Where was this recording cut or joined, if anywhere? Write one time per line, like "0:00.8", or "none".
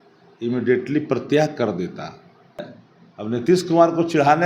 0:02.6